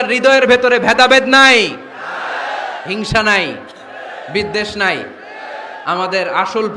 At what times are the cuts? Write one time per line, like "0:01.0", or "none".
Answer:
none

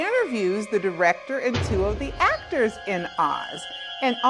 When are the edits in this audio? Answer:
0:01.6

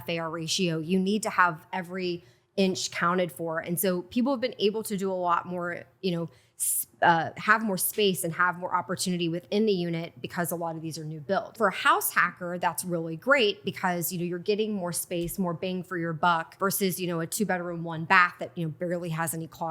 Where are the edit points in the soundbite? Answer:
0:11.6
0:16.5

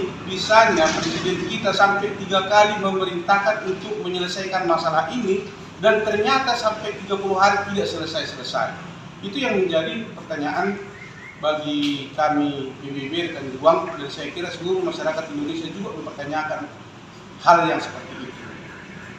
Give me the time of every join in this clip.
none

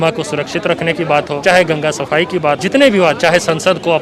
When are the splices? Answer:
0:01.4
0:02.6

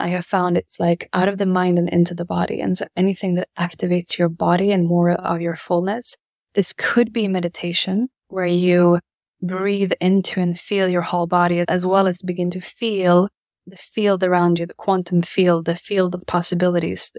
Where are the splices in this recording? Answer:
0:08.2
0:11.7
0:13.6

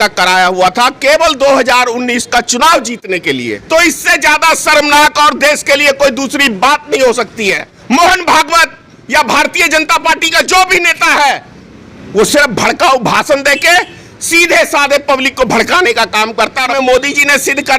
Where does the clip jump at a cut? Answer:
0:03.5
0:07.7
0:16.7

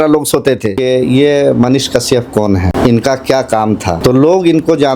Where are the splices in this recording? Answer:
0:00.8
0:02.7
0:04.0

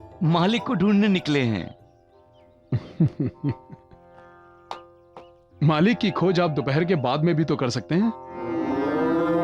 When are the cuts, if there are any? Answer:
none

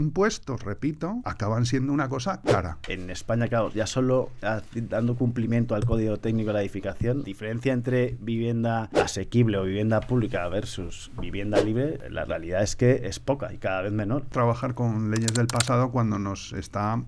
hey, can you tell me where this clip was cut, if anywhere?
0:01.3
0:02.8
0:07.2
0:08.9
0:12.0
0:14.3

